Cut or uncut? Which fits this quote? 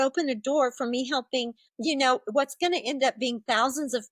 cut